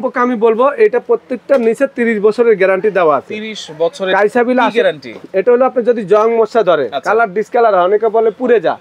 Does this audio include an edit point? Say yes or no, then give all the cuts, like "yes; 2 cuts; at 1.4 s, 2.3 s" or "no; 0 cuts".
no; 0 cuts